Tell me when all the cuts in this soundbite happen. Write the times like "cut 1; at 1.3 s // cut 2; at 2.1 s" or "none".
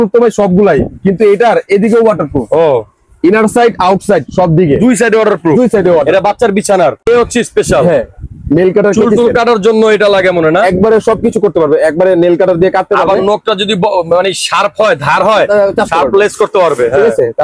cut 1; at 7.0 s

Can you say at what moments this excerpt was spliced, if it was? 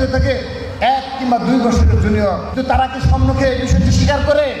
cut 1; at 2.5 s

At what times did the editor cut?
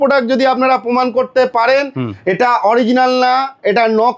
none

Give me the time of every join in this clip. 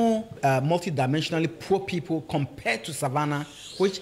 none

